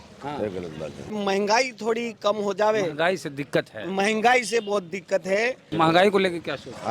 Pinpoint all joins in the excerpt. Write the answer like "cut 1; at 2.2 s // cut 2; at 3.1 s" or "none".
cut 1; at 1.1 s // cut 2; at 5.7 s